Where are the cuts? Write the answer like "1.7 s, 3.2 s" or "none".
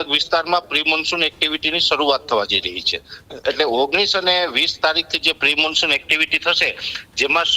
none